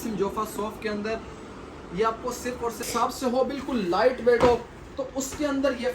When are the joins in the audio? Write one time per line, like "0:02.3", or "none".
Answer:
0:02.9